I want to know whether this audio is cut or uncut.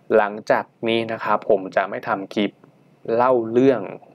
uncut